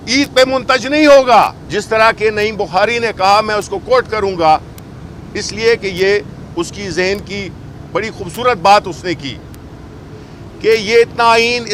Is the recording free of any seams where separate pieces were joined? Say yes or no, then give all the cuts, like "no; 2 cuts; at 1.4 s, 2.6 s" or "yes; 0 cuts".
no; 1 cut; at 1.6 s